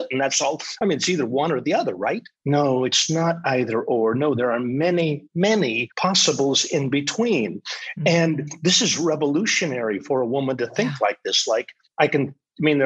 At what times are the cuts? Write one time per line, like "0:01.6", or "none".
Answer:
0:02.3
0:05.4
0:11.8

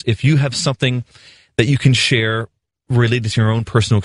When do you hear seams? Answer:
0:03.0

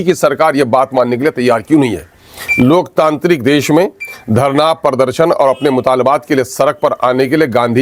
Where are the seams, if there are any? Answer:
none

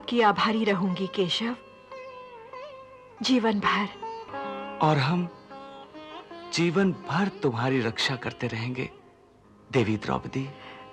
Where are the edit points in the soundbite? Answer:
0:04.3

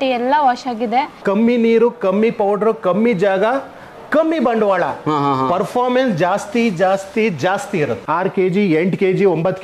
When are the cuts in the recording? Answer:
0:01.2
0:08.0

